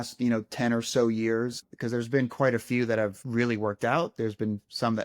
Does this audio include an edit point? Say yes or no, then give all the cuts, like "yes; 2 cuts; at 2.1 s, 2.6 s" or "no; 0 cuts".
yes; 2 cuts; at 1.7 s, 3.2 s